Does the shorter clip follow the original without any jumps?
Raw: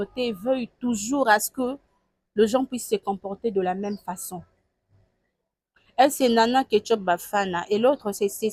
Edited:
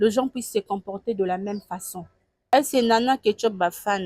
no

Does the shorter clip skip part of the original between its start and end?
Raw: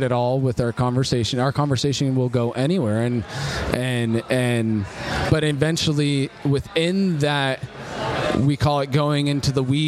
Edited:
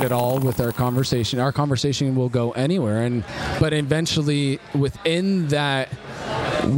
yes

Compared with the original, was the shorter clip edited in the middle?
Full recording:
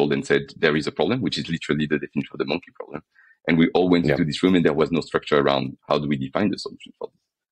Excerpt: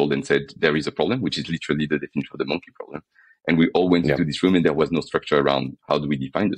no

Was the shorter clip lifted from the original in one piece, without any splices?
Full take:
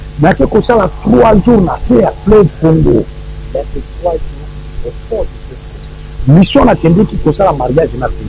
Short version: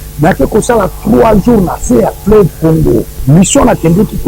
no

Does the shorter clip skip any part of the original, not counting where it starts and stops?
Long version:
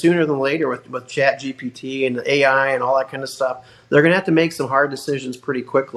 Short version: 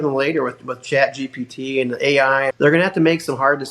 yes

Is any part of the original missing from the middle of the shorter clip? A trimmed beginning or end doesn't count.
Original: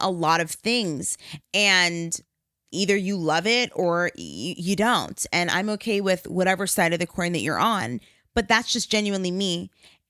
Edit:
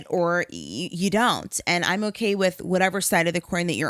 no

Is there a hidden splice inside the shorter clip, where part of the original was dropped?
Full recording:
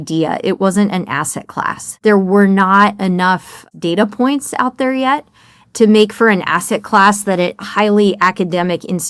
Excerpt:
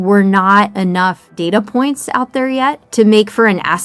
yes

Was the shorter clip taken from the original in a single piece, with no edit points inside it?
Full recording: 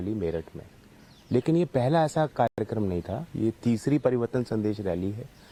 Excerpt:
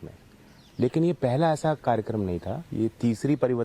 no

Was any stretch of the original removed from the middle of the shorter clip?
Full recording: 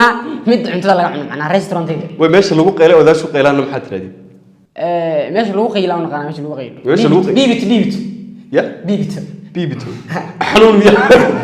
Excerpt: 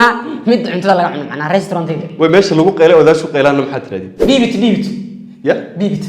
yes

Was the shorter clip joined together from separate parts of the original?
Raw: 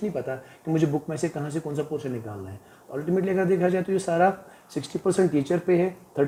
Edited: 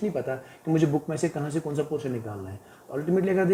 no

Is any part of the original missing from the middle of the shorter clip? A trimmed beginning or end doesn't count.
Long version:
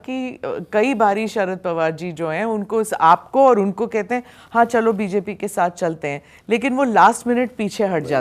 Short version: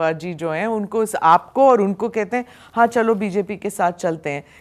no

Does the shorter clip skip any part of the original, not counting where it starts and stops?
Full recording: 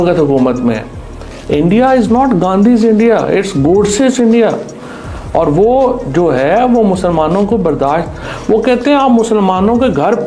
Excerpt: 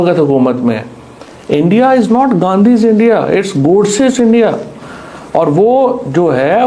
no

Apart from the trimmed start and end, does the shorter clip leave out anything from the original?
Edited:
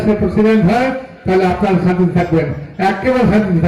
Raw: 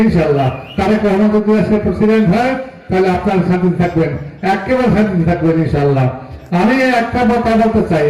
no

